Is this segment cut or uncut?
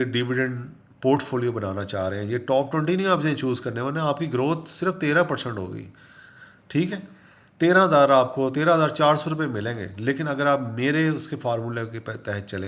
uncut